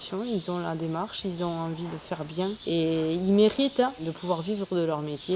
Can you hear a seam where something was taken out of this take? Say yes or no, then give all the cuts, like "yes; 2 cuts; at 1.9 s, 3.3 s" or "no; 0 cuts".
yes; 2 cuts; at 2.6 s, 4.1 s